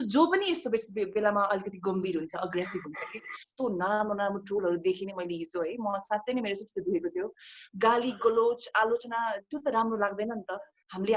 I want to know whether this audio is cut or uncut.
cut